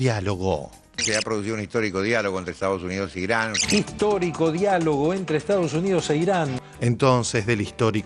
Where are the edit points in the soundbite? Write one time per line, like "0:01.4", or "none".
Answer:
0:01.0
0:06.6